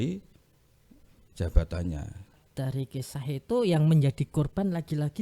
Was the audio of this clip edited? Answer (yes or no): yes